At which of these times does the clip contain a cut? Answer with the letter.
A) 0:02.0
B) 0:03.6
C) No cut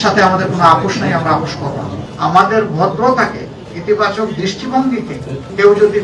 A